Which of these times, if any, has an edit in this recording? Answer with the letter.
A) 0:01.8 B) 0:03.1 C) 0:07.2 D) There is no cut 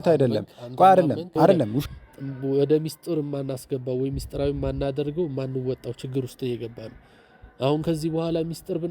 A